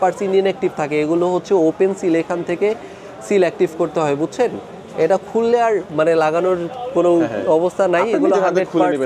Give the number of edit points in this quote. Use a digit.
0